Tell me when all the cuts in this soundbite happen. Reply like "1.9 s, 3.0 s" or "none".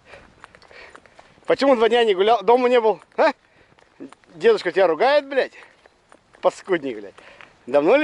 none